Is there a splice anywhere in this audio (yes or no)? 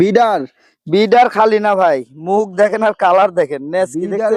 no